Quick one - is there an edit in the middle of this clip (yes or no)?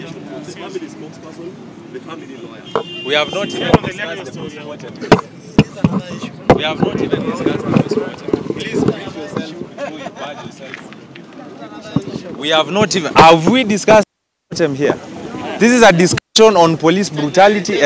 no